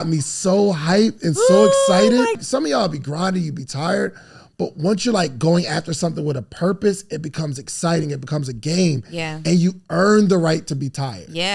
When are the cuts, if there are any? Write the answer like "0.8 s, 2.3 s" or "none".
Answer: 2.4 s